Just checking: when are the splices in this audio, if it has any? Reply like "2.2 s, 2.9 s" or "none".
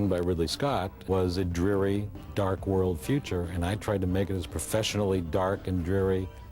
0.9 s, 2.2 s